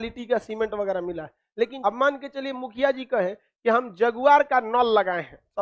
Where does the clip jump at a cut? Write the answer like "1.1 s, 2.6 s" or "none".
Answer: 1.7 s